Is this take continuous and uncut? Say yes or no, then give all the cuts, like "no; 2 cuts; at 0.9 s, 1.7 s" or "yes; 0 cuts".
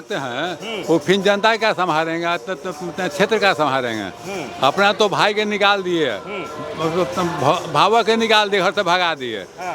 yes; 0 cuts